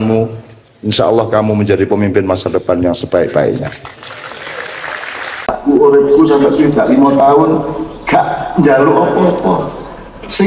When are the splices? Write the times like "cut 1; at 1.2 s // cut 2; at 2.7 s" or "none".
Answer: cut 1; at 5.6 s

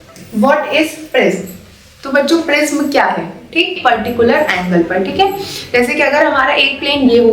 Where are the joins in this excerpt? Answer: cut 1; at 3.7 s

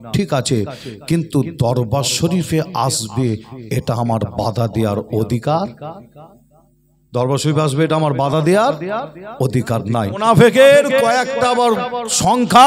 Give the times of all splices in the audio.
cut 1; at 10.2 s

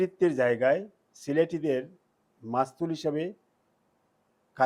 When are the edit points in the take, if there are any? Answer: none

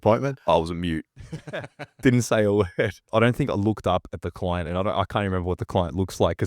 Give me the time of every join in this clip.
cut 1; at 3.0 s

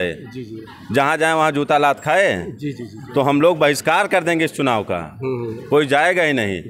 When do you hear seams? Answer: none

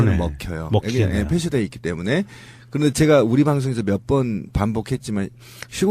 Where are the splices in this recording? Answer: none

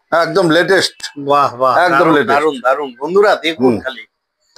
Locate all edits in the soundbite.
none

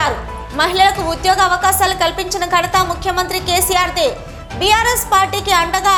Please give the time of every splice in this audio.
none

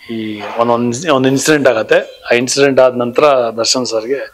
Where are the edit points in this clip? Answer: none

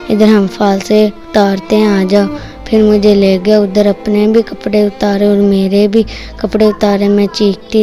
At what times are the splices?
none

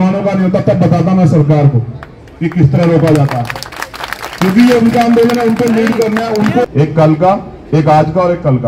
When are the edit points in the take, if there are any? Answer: cut 1; at 6.7 s

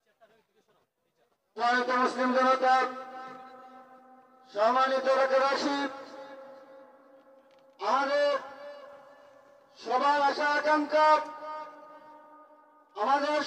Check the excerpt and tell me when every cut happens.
none

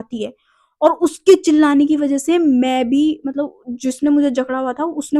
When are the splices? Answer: none

